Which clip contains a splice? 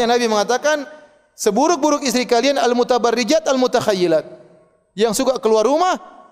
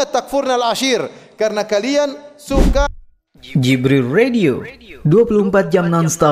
second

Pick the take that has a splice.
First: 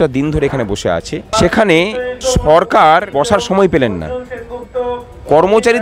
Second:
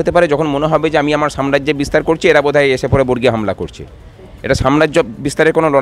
first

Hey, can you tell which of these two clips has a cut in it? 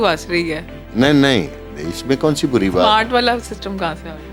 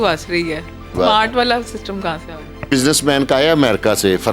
second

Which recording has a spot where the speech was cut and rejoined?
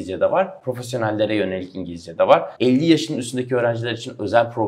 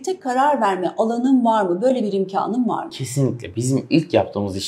first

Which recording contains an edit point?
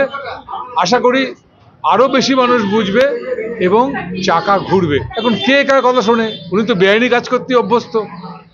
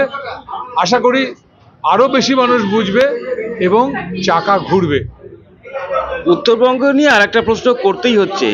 first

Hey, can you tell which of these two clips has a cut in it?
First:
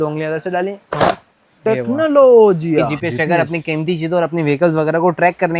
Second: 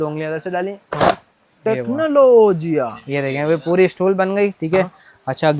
first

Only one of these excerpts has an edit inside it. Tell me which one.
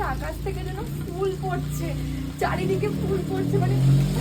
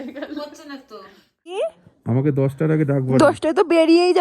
second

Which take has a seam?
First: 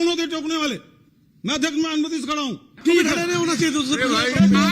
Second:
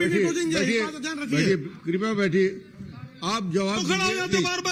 first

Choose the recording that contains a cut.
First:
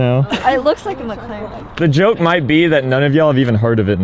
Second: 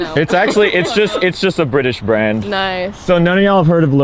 first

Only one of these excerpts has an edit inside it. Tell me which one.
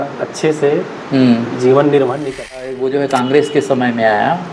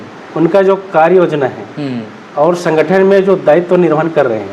first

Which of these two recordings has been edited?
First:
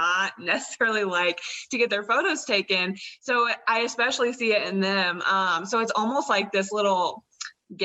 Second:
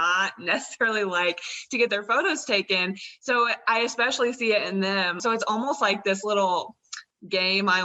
second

